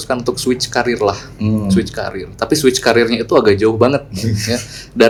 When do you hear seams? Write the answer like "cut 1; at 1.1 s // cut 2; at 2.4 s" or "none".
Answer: none